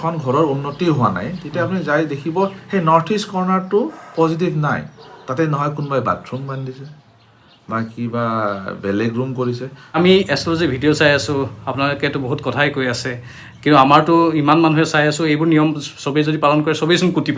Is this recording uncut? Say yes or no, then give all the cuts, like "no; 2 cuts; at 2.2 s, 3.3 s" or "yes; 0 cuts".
no; 1 cut; at 10.0 s